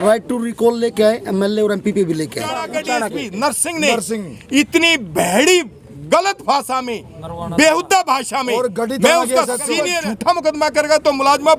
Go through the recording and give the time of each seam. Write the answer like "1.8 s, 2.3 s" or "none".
2.6 s, 10.0 s